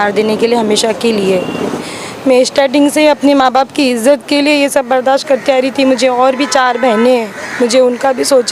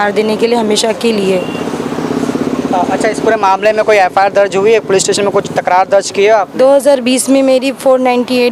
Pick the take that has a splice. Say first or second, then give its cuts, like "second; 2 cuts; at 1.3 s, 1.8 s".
first; 1 cut; at 1.8 s